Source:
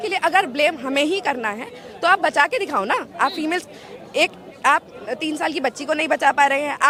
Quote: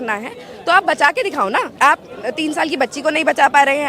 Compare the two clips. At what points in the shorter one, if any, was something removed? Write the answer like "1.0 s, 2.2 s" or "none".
1.7 s